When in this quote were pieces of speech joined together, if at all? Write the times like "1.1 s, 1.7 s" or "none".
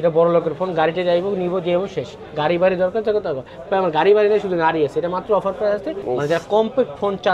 5.9 s